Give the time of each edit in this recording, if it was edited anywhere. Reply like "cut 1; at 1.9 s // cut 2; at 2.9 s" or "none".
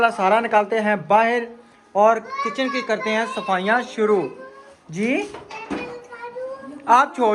none